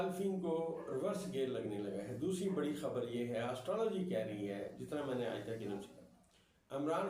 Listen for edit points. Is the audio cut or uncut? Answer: uncut